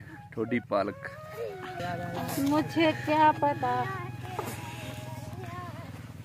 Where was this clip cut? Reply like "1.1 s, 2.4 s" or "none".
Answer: 1.7 s